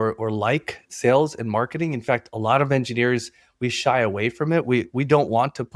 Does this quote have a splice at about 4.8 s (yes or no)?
no